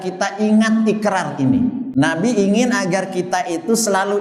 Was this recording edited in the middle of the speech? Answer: no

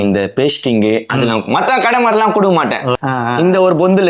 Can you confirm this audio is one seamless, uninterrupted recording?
no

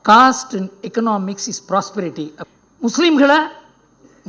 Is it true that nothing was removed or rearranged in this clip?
no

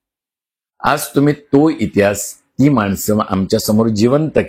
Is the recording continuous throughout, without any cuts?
yes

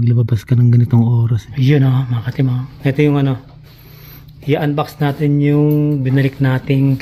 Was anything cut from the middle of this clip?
yes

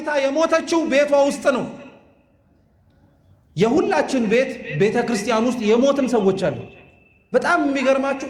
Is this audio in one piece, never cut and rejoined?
yes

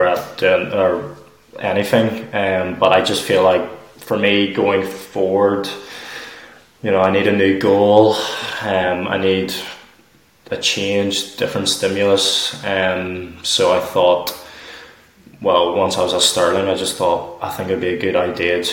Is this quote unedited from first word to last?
yes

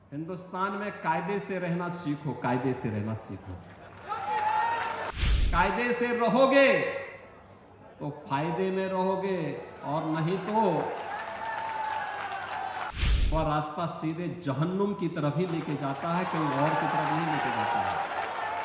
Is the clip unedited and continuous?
no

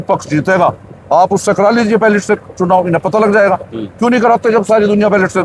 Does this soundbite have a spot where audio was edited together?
no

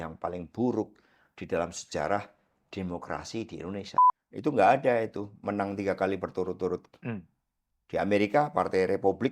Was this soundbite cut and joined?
yes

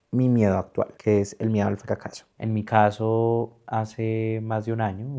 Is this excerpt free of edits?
no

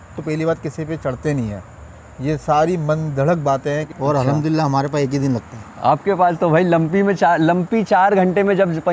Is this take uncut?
no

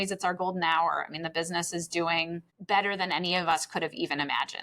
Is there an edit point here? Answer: yes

